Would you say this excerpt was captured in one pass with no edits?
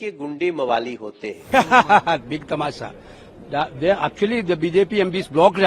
no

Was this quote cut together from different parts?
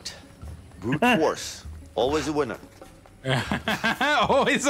no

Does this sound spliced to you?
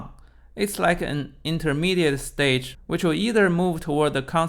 yes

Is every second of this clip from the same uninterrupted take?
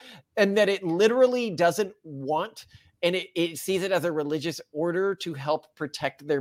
yes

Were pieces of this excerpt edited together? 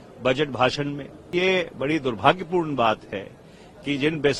yes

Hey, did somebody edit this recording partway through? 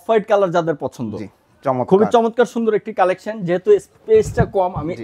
no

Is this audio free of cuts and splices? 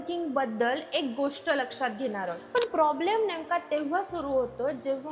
no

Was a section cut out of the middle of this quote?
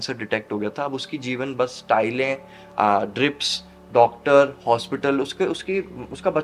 no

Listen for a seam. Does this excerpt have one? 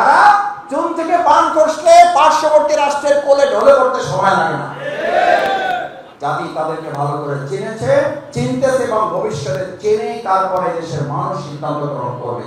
yes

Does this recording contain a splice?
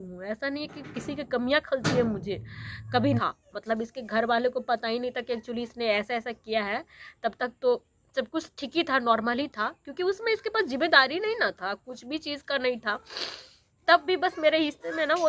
yes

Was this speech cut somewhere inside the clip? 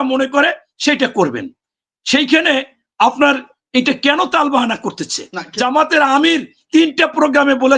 yes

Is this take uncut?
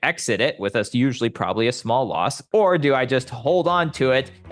no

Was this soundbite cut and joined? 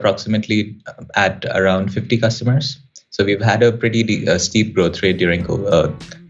no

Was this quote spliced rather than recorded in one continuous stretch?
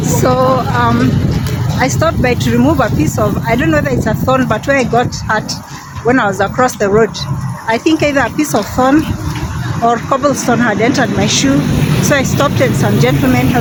no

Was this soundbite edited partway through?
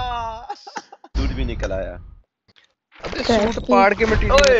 yes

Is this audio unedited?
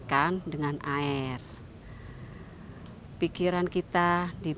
yes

